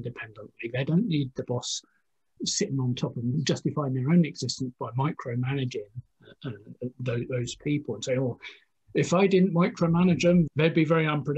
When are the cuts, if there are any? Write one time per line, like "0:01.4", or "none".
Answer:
0:03.3
0:10.5